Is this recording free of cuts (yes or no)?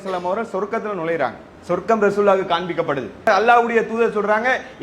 no